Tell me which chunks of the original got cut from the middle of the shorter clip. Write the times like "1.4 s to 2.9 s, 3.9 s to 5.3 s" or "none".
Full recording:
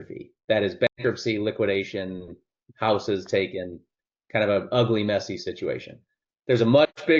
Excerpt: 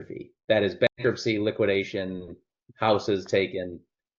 none